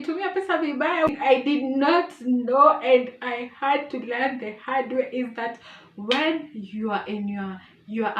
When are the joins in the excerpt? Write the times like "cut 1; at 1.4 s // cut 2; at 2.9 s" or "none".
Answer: cut 1; at 1.1 s